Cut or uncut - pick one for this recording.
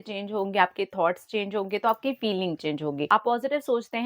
cut